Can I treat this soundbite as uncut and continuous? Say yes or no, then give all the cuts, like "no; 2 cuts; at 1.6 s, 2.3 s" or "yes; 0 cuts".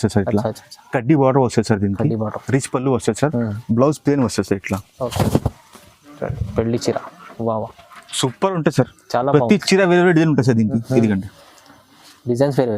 no; 1 cut; at 5.1 s